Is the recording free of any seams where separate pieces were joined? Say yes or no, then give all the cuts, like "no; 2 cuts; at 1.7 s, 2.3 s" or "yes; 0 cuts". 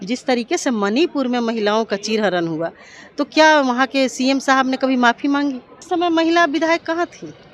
no; 1 cut; at 5.7 s